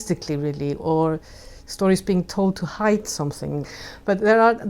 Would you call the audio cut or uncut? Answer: cut